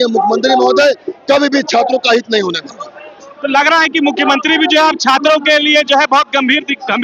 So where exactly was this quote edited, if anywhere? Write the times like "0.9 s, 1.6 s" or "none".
none